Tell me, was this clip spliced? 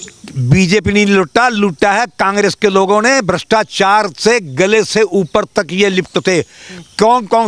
no; 0 cuts

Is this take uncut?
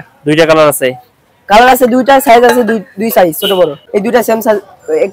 no; 1 cut; at 3.8 s

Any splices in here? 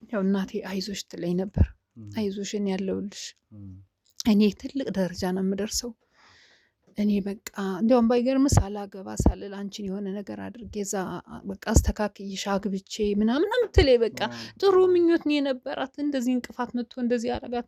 no; 0 cuts

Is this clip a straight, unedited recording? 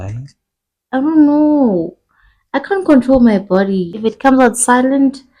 no; 1 cut; at 3.9 s

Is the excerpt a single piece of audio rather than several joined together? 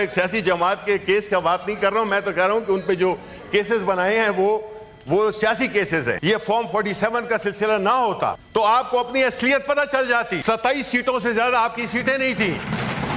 no; 3 cuts; at 6.2 s, 8.4 s, 10.4 s

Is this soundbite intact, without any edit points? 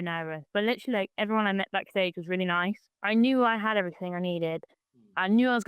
no; 1 cut; at 2.9 s

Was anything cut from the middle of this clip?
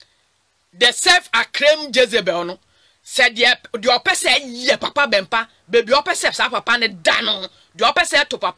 no; 0 cuts

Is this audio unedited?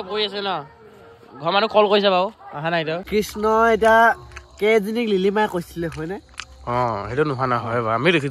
no; 1 cut; at 3.0 s

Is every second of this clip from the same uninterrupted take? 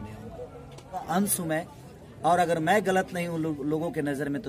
no; 1 cut; at 1.0 s

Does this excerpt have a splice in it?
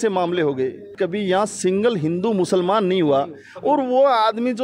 yes; 1 cut; at 0.9 s

